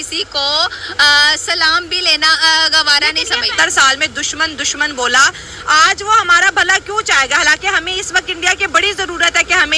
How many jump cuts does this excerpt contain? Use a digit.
0